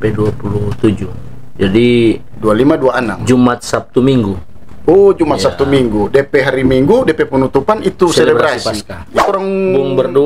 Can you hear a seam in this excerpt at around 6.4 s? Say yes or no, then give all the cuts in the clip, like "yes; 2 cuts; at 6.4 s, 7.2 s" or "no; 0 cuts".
no; 1 cut; at 9.2 s